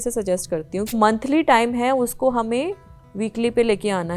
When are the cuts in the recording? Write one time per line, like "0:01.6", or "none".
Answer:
0:00.9